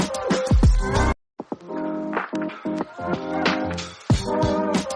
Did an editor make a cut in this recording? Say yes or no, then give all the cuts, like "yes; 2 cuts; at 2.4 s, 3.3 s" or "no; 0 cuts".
yes; 1 cut; at 1.5 s